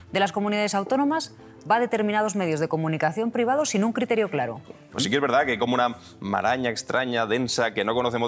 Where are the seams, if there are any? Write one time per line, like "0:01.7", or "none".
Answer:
0:05.0